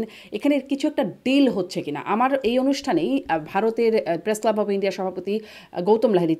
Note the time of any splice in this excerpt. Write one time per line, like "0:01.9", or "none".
none